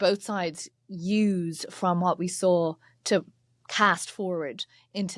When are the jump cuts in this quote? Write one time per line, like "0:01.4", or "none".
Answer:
none